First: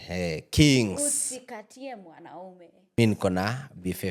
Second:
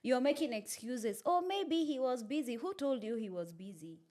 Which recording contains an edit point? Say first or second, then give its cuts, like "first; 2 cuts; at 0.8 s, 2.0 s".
first; 1 cut; at 3.0 s